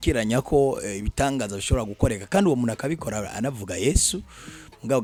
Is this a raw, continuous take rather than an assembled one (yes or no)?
yes